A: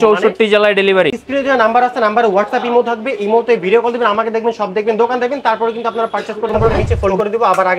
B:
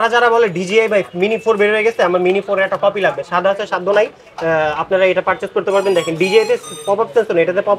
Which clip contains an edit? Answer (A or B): A